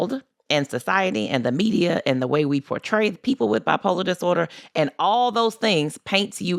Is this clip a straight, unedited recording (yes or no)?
yes